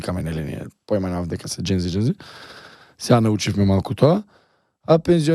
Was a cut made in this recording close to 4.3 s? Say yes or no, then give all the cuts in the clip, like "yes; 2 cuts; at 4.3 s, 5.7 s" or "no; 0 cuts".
no; 0 cuts